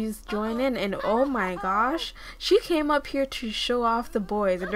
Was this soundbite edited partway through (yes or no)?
no